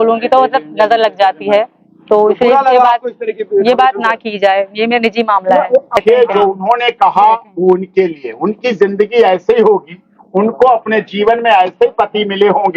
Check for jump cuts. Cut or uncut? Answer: cut